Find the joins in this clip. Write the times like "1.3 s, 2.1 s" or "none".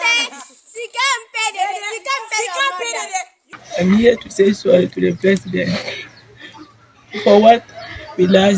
3.4 s